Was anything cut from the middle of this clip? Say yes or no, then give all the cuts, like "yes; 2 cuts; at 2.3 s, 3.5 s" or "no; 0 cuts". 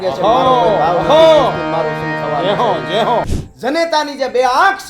yes; 1 cut; at 3.3 s